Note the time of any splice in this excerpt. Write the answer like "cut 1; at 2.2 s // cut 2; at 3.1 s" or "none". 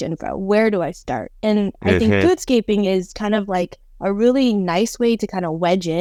none

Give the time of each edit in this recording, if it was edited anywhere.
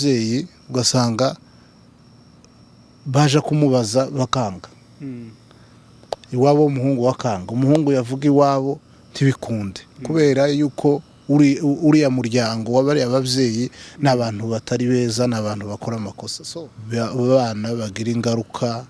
cut 1; at 16.3 s

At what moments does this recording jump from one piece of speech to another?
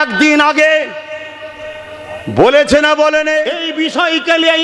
cut 1; at 3.6 s

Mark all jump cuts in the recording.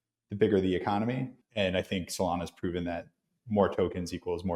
cut 1; at 1.4 s

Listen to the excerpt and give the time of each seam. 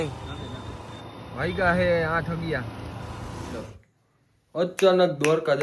cut 1; at 3.6 s

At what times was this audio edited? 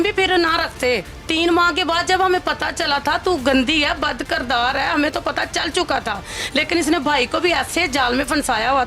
cut 1; at 1.1 s

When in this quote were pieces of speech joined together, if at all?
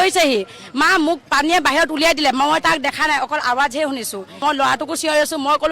cut 1; at 4.4 s

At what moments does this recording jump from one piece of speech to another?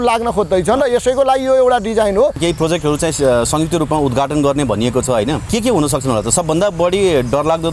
cut 1; at 2.4 s // cut 2; at 5.4 s

